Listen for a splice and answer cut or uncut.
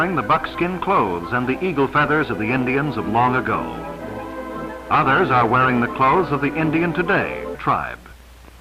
uncut